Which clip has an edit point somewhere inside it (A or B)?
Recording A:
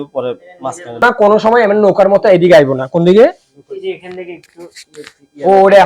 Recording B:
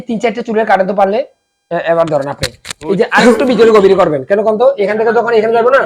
A